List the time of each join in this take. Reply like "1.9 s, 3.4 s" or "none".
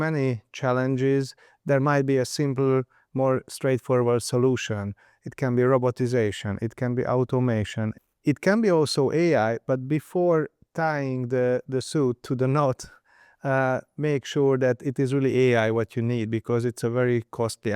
7.8 s